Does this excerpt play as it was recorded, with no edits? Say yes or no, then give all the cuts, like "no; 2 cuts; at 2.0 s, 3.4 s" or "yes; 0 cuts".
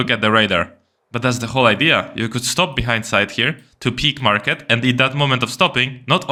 yes; 0 cuts